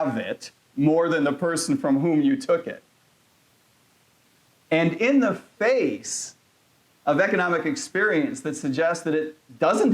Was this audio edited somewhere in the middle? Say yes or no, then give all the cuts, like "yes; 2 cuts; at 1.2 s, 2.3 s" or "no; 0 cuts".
no; 0 cuts